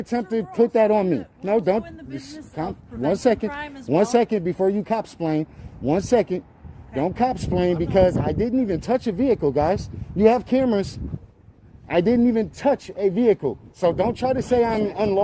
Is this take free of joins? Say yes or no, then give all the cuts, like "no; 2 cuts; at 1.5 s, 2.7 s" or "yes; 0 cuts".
yes; 0 cuts